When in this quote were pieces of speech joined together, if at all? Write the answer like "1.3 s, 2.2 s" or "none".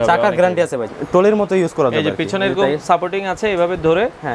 0.9 s